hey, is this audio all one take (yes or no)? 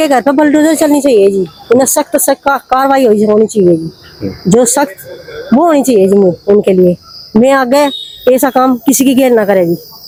yes